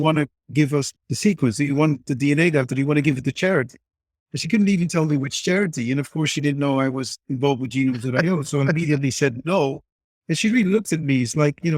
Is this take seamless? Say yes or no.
no